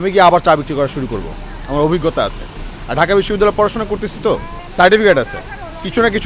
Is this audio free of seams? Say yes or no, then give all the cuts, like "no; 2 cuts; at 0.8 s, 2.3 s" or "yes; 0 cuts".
no; 1 cut; at 4.6 s